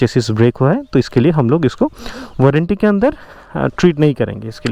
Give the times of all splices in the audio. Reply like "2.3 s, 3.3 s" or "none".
none